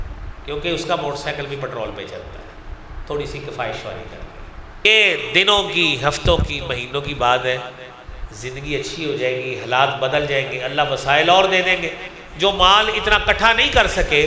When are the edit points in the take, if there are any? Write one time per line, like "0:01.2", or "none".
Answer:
0:04.9